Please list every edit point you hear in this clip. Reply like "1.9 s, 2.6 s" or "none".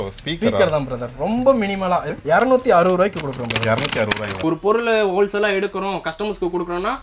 2.1 s, 4.4 s